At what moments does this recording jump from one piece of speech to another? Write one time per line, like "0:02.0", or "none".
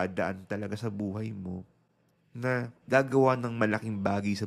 0:02.8